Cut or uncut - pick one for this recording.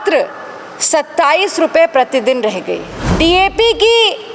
cut